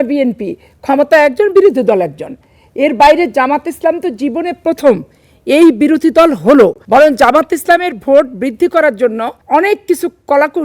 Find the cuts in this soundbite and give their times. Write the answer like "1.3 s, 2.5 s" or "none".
6.8 s, 9.3 s